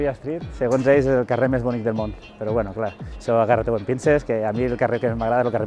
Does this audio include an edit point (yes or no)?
no